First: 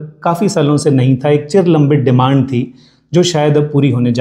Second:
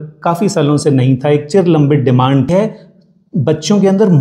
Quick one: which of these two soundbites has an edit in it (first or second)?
second